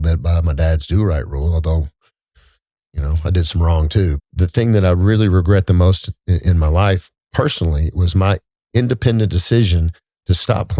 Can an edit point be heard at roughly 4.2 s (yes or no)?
yes